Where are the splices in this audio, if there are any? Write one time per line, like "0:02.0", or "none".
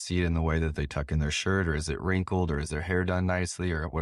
none